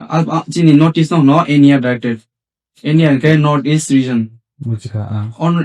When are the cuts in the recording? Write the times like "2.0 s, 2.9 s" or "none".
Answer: none